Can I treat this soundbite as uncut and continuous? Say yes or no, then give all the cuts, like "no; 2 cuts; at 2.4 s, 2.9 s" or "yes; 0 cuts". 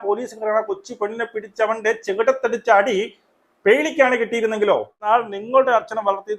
no; 1 cut; at 5.1 s